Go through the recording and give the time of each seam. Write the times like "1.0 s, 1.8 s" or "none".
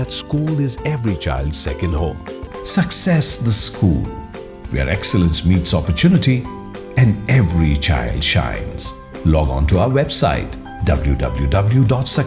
2.4 s